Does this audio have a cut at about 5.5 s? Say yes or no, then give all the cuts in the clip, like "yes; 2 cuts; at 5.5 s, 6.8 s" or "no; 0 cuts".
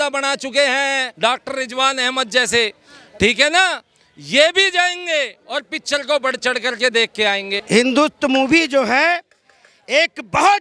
no; 1 cut; at 7.6 s